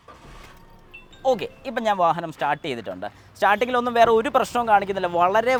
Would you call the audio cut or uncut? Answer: uncut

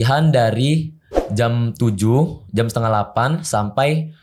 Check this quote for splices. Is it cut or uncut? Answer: uncut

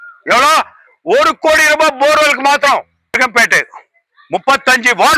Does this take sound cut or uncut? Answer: cut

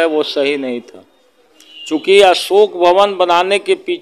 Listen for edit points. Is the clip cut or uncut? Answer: uncut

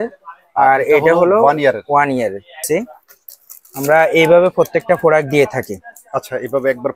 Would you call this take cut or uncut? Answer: cut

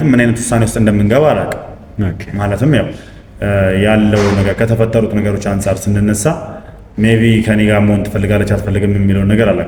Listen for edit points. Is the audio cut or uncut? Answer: uncut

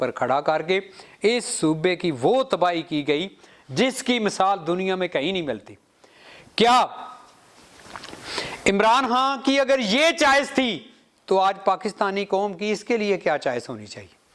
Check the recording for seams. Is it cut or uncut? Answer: uncut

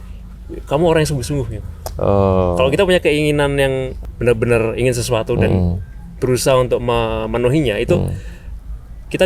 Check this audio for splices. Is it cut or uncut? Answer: cut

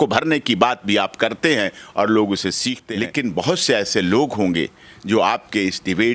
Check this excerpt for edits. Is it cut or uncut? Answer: cut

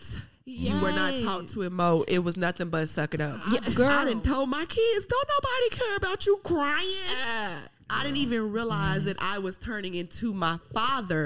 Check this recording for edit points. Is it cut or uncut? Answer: cut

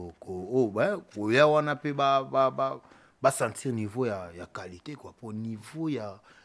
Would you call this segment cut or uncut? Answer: uncut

